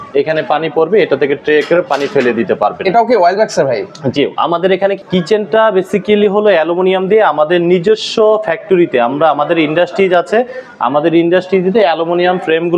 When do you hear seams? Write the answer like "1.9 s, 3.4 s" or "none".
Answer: none